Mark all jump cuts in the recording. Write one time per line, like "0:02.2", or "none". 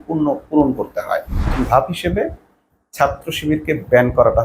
0:01.4